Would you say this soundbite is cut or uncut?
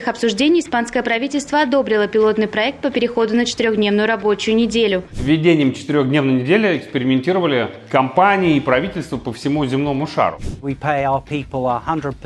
cut